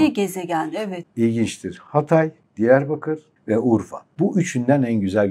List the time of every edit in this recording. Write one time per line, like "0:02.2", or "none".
0:00.9
0:02.4
0:03.3
0:04.0